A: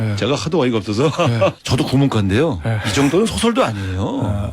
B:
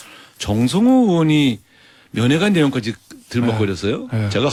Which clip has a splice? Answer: A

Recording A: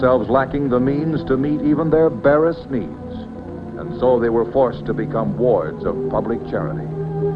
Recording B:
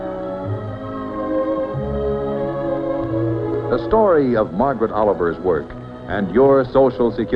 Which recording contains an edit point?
B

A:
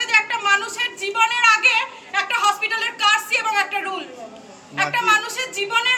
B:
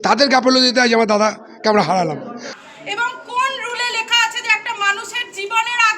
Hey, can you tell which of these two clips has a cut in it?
B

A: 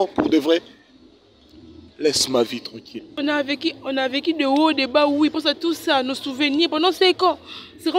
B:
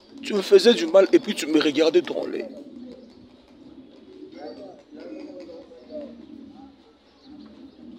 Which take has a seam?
A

